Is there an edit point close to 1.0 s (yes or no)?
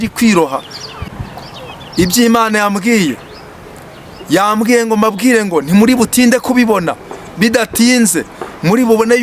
yes